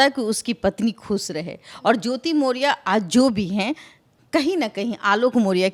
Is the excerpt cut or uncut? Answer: uncut